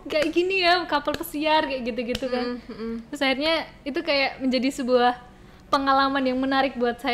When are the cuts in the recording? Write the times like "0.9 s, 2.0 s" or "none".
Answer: none